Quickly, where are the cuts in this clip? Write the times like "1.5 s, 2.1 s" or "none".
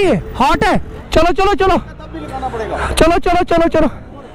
1.0 s